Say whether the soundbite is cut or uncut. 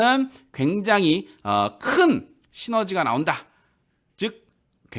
uncut